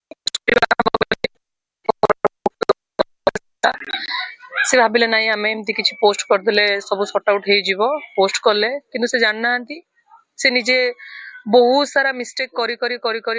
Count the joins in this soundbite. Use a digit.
1